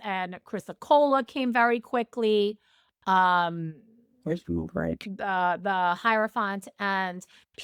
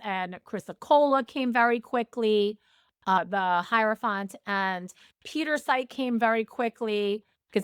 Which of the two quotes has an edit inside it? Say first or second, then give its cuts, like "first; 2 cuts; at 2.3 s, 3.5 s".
second; 1 cut; at 3.2 s